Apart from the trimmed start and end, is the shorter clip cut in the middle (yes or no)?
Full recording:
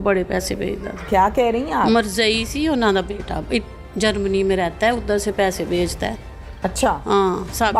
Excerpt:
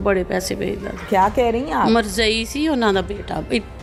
no